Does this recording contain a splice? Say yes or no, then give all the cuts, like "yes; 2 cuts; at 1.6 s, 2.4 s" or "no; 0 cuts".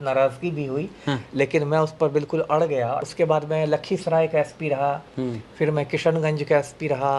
yes; 1 cut; at 3.0 s